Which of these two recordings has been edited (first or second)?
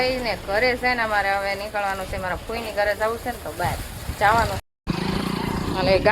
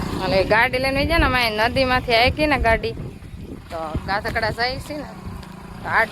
first